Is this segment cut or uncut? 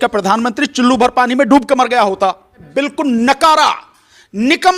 cut